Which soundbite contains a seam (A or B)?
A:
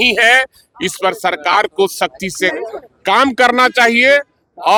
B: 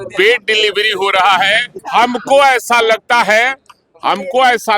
B